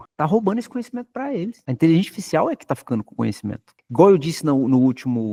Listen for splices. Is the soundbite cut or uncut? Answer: uncut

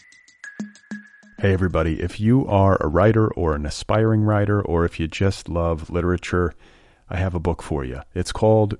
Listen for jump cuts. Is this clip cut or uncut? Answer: cut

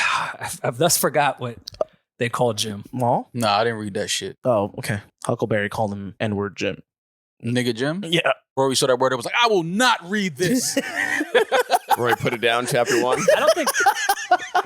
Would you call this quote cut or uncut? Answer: cut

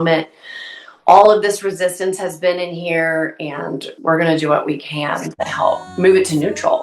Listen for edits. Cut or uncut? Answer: cut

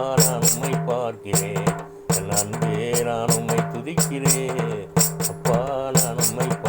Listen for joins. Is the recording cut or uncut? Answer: cut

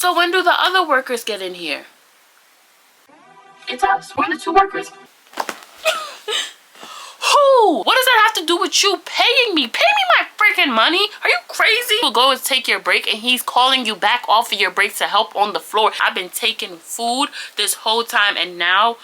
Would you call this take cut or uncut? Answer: cut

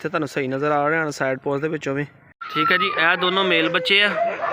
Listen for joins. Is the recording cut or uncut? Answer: cut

